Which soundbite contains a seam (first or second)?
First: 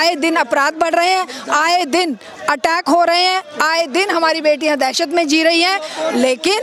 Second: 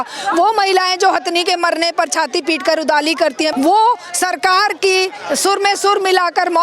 second